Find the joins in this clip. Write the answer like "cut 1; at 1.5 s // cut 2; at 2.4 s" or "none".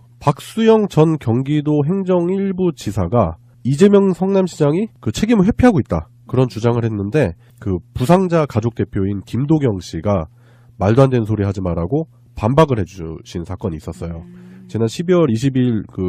none